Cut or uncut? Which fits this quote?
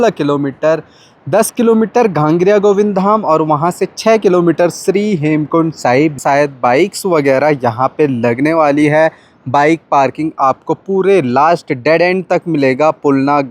cut